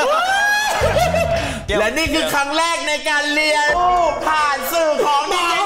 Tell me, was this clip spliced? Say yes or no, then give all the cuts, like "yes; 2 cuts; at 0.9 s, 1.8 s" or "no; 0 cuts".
no; 0 cuts